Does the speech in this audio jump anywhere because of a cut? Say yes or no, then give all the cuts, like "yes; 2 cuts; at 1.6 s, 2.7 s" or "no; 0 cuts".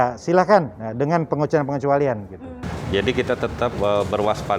yes; 1 cut; at 2.3 s